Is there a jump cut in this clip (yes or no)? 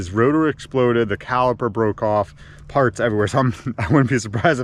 no